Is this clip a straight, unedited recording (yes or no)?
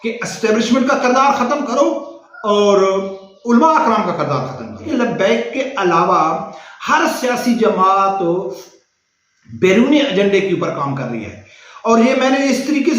no